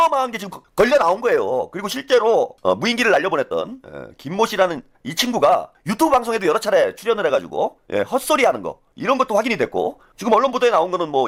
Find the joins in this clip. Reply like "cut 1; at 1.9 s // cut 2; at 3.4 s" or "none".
none